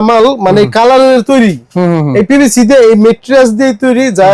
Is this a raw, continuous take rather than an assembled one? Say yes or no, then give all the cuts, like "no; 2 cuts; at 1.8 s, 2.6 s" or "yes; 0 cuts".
yes; 0 cuts